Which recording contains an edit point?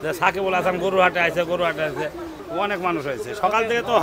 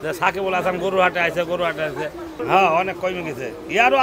first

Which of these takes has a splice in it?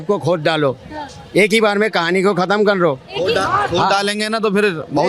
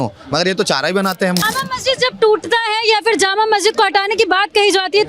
second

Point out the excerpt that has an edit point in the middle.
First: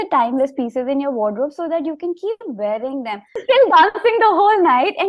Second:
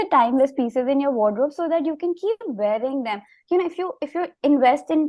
first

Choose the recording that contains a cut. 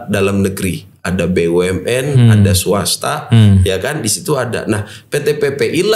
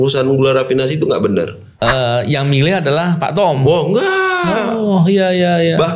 second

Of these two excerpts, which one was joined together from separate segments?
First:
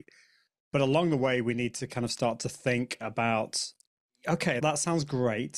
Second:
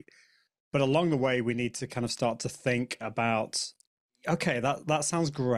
first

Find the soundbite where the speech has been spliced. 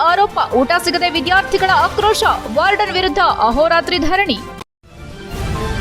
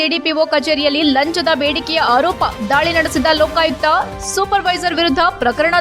first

